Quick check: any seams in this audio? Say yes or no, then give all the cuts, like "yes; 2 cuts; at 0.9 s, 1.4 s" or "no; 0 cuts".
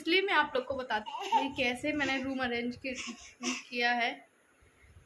yes; 1 cut; at 1.1 s